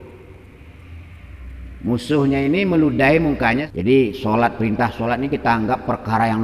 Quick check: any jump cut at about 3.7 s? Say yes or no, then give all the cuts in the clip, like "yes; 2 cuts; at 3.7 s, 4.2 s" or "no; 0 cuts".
yes; 1 cut; at 3.7 s